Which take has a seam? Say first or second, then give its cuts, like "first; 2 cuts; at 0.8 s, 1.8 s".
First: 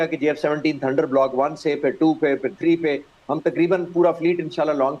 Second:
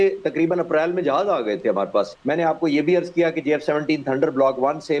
second; 1 cut; at 2.2 s